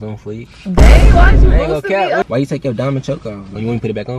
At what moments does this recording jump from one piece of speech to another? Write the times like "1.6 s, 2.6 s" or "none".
2.2 s